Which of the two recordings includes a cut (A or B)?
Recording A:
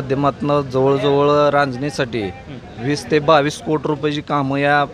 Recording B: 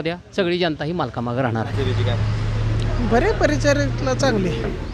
B